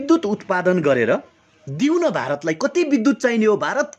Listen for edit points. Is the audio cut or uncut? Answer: uncut